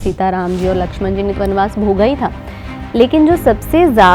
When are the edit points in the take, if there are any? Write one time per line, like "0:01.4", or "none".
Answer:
0:01.3